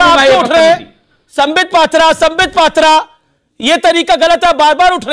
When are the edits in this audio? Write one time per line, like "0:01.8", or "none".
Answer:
none